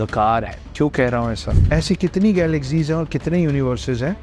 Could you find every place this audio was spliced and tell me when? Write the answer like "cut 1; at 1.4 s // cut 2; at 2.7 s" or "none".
cut 1; at 1.5 s